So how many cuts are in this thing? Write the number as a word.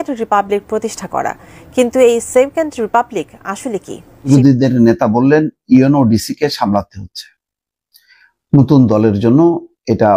one